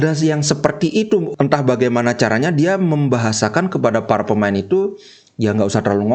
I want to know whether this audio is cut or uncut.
cut